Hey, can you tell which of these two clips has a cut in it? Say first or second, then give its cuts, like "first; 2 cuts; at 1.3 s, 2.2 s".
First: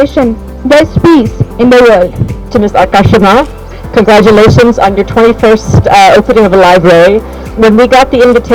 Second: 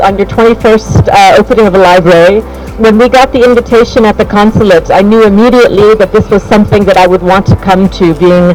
first; 1 cut; at 2.5 s